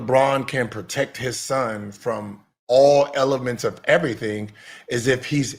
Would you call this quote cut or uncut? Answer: uncut